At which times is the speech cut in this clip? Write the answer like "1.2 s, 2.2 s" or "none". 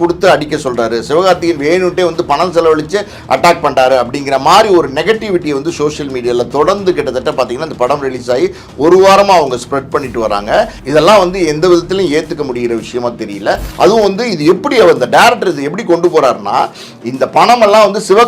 10.8 s, 13.7 s